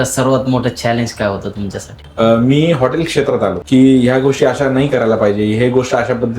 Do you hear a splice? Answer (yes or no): yes